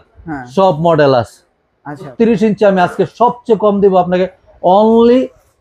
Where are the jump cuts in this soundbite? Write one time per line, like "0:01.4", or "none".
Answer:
0:02.1